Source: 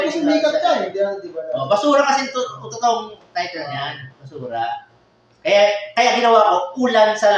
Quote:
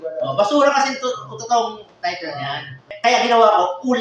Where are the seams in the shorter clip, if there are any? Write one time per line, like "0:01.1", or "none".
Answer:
0:02.9